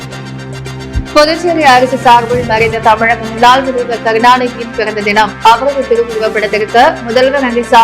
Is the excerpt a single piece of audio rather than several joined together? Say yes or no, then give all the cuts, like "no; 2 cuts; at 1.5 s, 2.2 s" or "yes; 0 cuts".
no; 1 cut; at 0.9 s